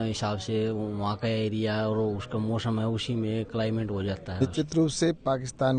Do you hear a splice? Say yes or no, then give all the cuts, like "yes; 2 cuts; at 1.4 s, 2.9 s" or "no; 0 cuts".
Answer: yes; 1 cut; at 4.4 s